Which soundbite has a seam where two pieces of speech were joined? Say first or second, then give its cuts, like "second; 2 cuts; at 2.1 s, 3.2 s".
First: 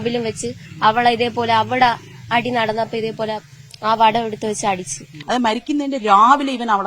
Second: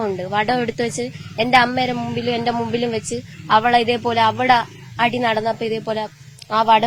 first; 1 cut; at 5.1 s